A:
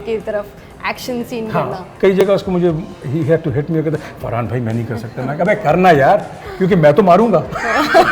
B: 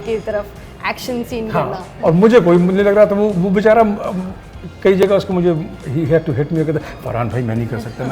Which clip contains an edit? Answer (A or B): A